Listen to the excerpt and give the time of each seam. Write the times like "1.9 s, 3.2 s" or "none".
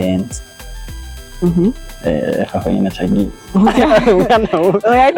none